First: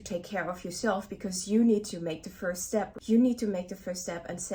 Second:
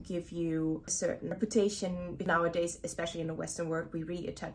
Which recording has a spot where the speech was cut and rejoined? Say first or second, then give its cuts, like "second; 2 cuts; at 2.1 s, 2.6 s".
second; 2 cuts; at 1.3 s, 2.3 s